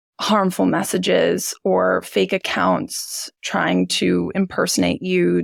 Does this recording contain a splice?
no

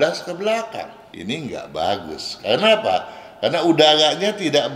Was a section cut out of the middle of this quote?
yes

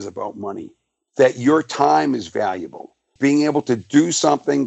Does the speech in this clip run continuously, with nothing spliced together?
no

